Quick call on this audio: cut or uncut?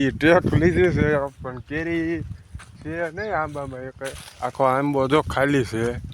uncut